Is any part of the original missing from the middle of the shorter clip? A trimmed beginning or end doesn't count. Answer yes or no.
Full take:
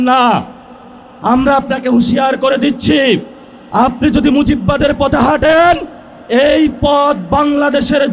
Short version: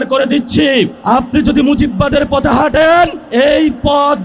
yes